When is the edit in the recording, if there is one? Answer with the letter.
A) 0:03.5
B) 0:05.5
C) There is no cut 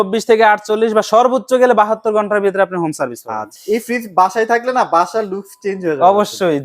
A